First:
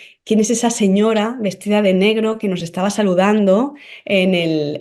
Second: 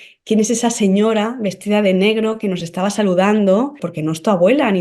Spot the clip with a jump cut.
second; 1 cut; at 3.9 s

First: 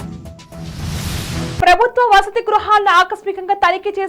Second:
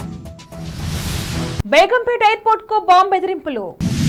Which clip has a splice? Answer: first; 1 cut; at 1.6 s

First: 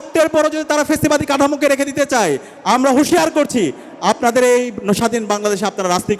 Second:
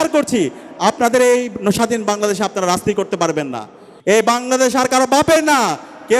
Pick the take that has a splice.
second; 1 cut; at 3.9 s

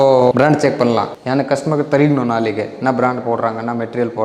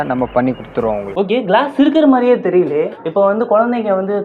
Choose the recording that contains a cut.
second; 1 cut; at 1.1 s

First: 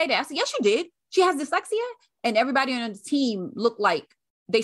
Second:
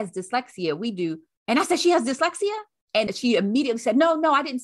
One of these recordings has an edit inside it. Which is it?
second; 2 cuts; at 1.3 s, 3.1 s

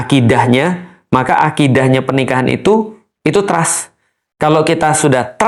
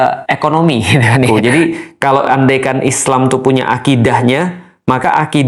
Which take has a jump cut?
second; 1 cut; at 1.3 s

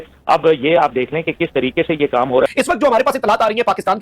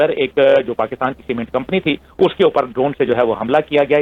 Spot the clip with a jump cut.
first; 1 cut; at 2.5 s

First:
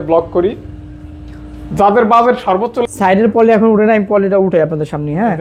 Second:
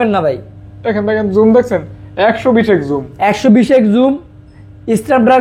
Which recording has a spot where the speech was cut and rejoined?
first; 1 cut; at 2.8 s

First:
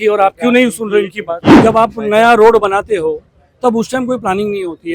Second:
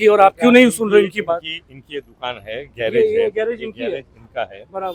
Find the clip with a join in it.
first; 1 cut; at 1.5 s

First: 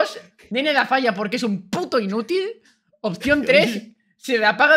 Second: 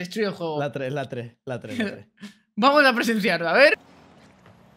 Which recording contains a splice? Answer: second; 1 cut; at 3.7 s

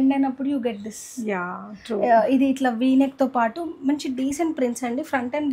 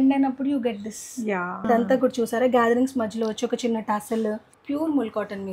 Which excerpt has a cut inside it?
second; 2 cuts; at 1.7 s, 4.5 s

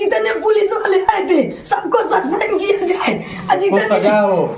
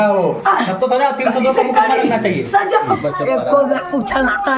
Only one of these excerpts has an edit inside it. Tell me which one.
second; 1 cut; at 3.0 s

